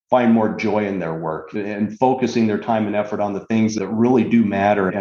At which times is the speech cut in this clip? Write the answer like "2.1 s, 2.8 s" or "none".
1.5 s, 3.7 s